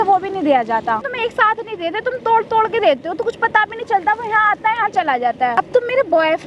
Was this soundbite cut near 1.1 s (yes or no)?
yes